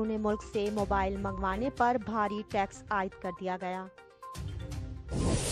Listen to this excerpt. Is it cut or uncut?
cut